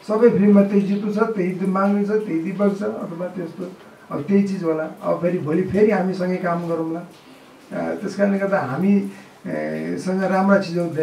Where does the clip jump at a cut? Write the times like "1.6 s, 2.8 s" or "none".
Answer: none

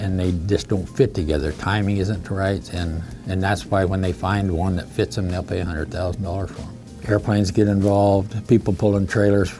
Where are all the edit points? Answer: 7.0 s

